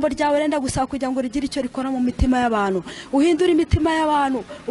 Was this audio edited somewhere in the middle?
no; 0 cuts

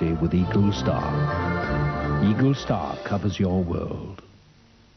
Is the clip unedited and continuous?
yes; 0 cuts

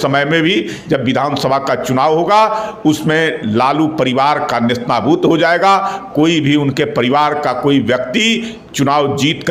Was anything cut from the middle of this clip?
no; 0 cuts

